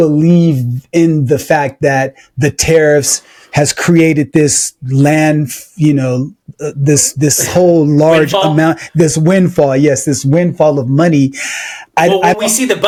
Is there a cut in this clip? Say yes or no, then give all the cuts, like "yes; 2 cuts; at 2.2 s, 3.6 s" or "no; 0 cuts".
no; 0 cuts